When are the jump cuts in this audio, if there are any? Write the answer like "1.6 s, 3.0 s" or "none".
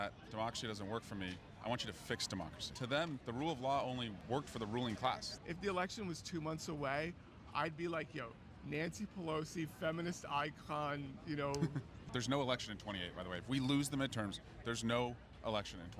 2.9 s, 4.2 s, 5.3 s, 12.0 s